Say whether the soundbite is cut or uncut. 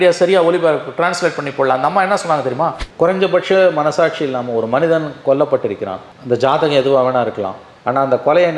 cut